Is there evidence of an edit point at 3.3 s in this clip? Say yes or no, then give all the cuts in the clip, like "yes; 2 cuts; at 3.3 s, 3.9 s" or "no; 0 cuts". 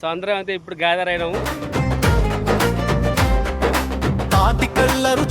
no; 1 cut; at 1.5 s